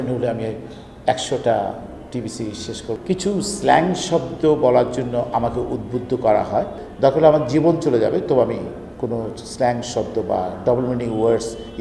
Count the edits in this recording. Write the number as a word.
two